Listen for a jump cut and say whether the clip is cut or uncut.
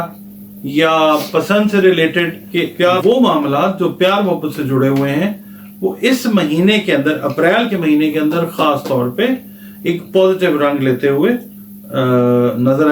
cut